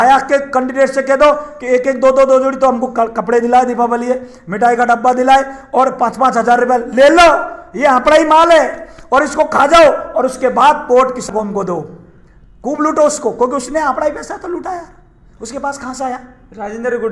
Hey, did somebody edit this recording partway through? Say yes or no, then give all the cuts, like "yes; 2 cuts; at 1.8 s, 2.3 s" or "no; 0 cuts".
no; 0 cuts